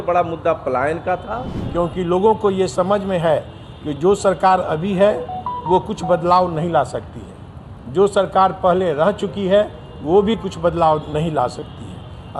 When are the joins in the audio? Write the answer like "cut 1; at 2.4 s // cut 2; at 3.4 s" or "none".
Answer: cut 1; at 1.6 s